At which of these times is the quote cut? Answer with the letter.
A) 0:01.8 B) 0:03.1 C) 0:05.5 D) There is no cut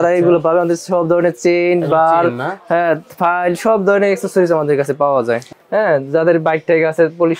C